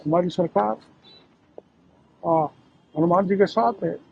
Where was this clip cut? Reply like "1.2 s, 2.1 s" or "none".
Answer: none